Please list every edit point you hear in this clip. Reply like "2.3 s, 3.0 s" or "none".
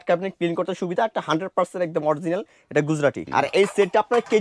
3.2 s